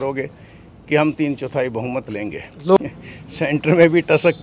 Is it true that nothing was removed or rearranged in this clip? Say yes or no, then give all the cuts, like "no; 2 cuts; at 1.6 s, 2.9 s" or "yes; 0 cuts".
no; 1 cut; at 2.8 s